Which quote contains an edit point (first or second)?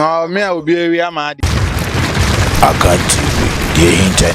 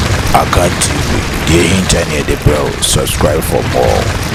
first